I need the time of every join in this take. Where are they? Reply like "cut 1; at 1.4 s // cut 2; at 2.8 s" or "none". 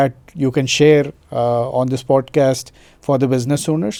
none